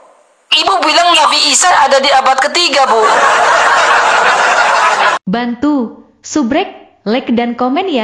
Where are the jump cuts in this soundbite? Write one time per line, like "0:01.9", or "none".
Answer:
0:05.2

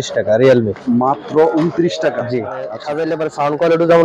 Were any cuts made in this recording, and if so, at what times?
0:02.8

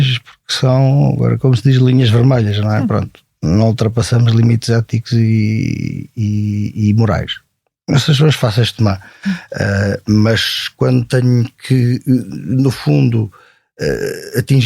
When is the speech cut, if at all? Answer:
none

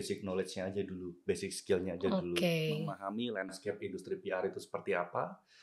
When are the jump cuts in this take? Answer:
0:03.0

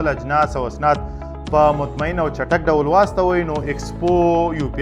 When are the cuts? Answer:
none

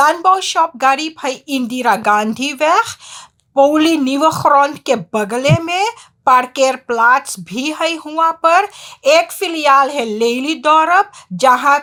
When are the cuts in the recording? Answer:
none

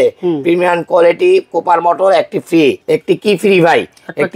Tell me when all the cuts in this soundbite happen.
0:02.8

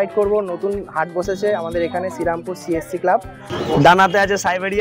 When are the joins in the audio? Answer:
0:03.4

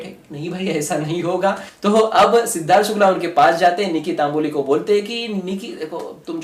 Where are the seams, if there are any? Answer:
0:01.7

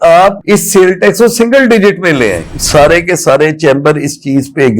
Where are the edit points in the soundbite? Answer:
0:02.5

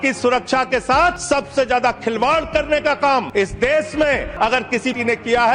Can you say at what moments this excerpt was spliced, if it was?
0:01.2
0:03.3
0:04.7

